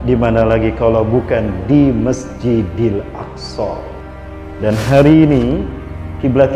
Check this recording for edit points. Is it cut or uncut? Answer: cut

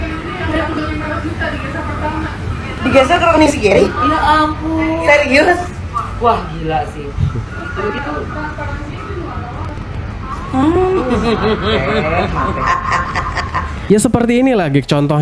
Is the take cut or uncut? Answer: cut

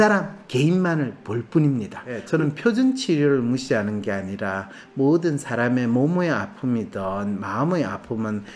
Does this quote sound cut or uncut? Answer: cut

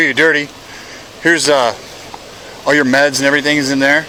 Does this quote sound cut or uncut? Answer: uncut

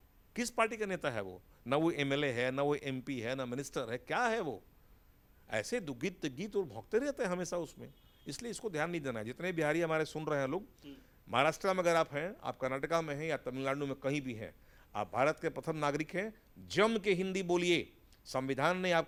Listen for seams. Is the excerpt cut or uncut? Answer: uncut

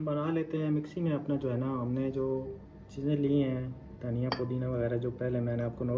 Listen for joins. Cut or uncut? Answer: uncut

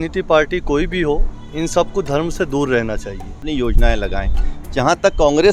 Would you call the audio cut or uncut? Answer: cut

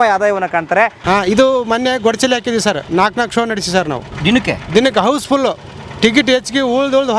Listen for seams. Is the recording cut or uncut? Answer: cut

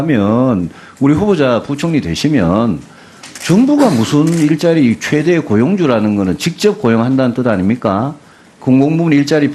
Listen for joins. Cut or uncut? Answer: uncut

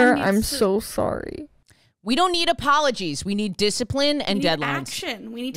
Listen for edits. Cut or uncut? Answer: cut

